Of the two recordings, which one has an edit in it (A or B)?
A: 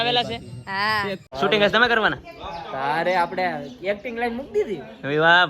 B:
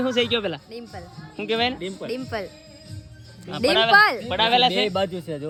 A